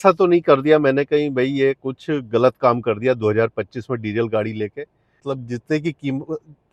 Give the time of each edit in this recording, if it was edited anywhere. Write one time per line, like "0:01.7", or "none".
0:05.2